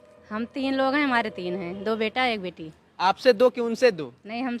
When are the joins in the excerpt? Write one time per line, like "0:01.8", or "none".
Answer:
none